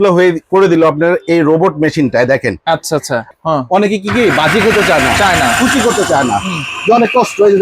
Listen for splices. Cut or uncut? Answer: cut